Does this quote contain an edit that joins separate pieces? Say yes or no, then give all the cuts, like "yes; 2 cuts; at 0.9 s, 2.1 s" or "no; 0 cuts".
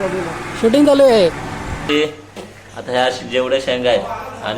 yes; 1 cut; at 1.9 s